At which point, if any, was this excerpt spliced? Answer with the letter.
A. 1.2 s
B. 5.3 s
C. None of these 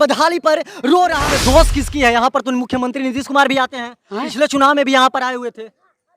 A